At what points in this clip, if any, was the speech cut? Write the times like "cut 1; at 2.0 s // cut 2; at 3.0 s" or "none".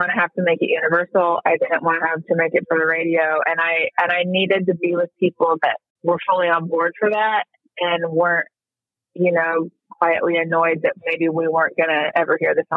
cut 1; at 5.9 s

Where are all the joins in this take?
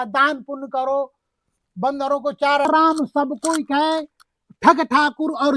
cut 1; at 2.7 s

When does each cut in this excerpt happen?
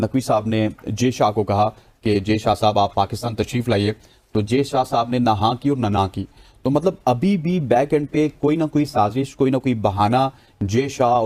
none

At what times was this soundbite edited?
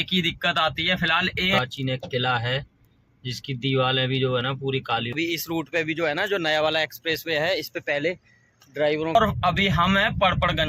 cut 1; at 1.6 s // cut 2; at 5.1 s // cut 3; at 9.2 s

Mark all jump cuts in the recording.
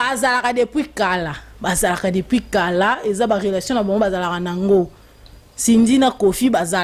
none

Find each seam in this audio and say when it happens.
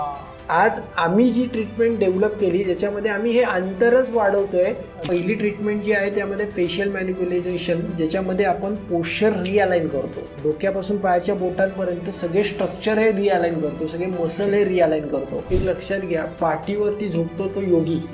cut 1; at 5.0 s // cut 2; at 15.4 s

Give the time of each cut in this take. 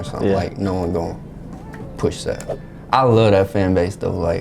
cut 1; at 2.5 s

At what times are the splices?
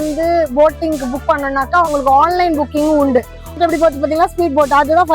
cut 1; at 3.6 s

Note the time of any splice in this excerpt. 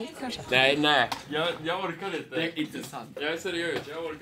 none

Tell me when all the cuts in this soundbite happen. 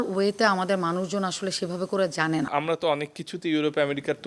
cut 1; at 2.5 s

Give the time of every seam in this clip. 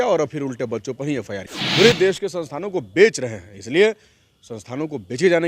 cut 1; at 1.5 s

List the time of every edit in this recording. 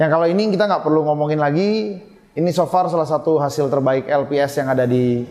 none

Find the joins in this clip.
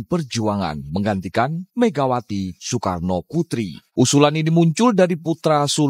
cut 1; at 3.8 s

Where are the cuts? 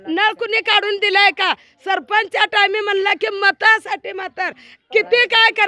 none

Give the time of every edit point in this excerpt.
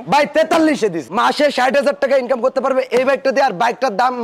cut 1; at 1.0 s

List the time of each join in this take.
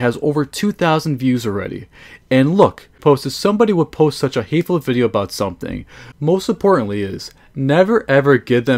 cut 1; at 6.1 s

